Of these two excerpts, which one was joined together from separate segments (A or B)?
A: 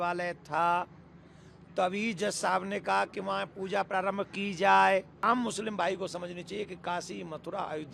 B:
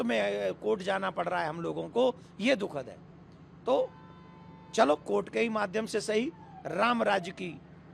A